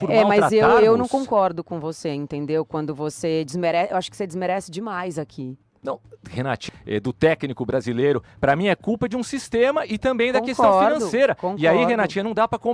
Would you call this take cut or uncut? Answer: cut